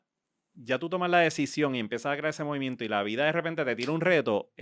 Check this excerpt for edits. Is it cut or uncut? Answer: uncut